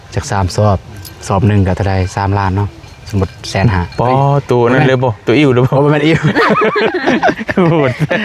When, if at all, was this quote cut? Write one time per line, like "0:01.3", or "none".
none